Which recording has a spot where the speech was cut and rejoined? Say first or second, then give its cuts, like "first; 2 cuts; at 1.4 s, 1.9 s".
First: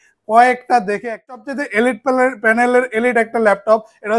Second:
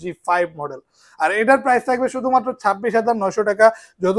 first; 1 cut; at 1.5 s